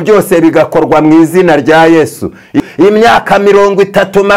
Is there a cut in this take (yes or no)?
yes